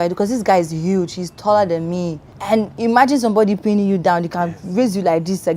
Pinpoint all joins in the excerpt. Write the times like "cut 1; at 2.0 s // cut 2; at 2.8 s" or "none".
cut 1; at 2.3 s